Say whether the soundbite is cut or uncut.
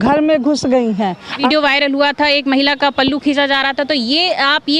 cut